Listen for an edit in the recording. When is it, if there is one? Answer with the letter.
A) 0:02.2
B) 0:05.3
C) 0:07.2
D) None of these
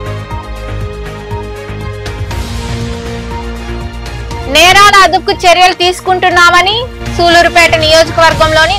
A